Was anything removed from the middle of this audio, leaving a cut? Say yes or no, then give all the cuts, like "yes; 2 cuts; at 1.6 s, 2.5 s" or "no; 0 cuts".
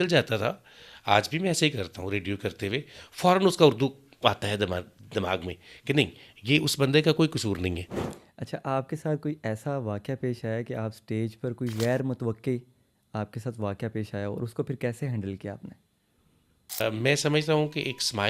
yes; 2 cuts; at 7.9 s, 16.8 s